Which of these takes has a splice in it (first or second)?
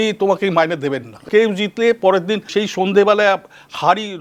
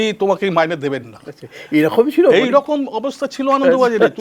first